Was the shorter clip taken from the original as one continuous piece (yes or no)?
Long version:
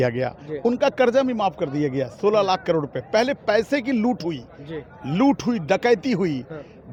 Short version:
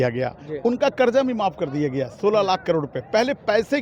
yes